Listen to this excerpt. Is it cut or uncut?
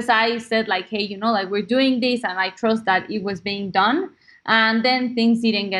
uncut